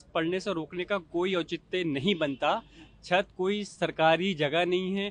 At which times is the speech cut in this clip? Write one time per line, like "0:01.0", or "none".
none